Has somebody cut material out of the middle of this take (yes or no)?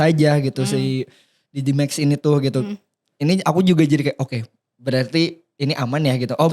no